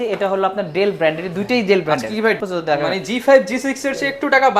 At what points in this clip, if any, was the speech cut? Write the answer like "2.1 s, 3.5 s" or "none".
2.4 s